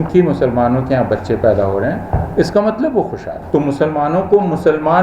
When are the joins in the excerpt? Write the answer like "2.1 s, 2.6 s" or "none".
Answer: 3.3 s